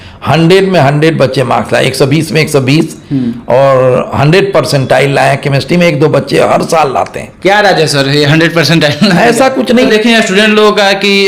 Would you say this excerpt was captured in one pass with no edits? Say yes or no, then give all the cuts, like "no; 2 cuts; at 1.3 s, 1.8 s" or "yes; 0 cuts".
no; 1 cut; at 9.9 s